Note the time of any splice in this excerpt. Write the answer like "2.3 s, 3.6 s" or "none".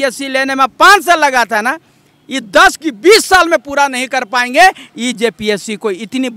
none